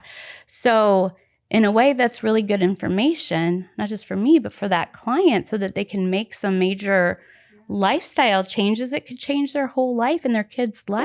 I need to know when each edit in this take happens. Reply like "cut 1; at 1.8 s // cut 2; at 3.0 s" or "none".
none